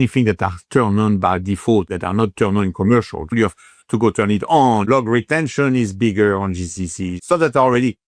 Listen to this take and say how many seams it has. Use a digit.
4